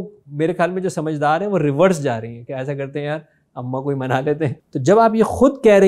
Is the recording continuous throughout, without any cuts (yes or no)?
no